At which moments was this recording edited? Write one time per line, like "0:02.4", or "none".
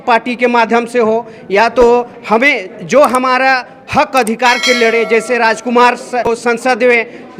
0:06.3